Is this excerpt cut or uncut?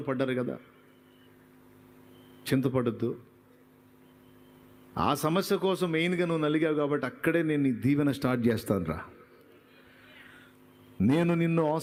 uncut